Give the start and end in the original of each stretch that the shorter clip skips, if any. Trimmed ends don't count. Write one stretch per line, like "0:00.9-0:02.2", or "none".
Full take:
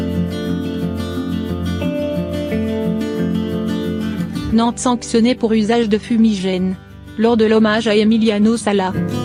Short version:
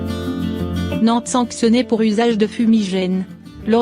0:01.9-0:04.5